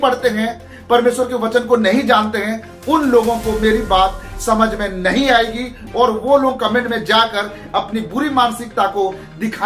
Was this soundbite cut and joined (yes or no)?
no